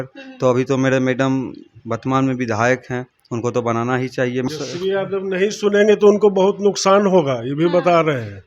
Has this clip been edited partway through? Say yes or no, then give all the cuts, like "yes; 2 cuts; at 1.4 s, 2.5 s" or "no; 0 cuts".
yes; 1 cut; at 4.5 s